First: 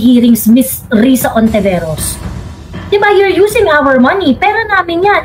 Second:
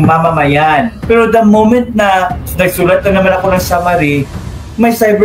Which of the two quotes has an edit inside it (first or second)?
second